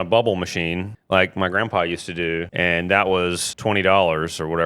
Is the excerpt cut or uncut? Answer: cut